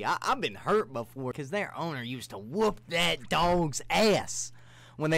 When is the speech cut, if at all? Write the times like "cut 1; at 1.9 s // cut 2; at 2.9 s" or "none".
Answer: cut 1; at 1.3 s